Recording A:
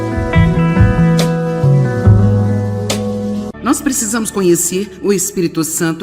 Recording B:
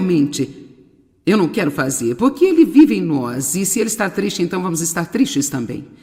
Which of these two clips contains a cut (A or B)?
A